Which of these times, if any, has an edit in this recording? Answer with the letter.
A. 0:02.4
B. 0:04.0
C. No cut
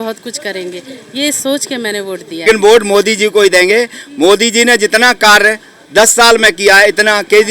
A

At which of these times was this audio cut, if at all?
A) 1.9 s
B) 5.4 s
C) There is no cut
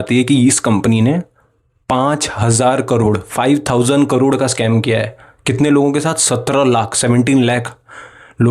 C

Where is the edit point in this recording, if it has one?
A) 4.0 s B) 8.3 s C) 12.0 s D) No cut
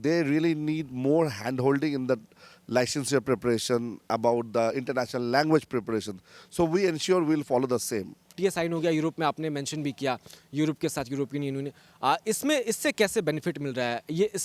B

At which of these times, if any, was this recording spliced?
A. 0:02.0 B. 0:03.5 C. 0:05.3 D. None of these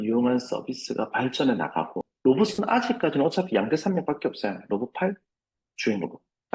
A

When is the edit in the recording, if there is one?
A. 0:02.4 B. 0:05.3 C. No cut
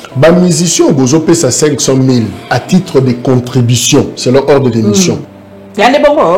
B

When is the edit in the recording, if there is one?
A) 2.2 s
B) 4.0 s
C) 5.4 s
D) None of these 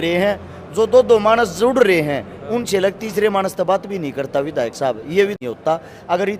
C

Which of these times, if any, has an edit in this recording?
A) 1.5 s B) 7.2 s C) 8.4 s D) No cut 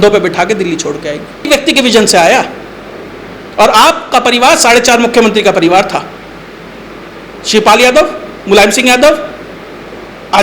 A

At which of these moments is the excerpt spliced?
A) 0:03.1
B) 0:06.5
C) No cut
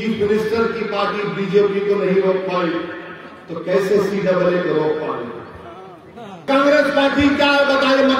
B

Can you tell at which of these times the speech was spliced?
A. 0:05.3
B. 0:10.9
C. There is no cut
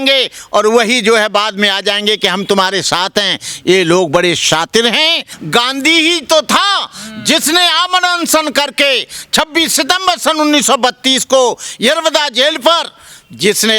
A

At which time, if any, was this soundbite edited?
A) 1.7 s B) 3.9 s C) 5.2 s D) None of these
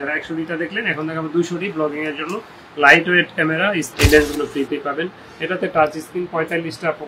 B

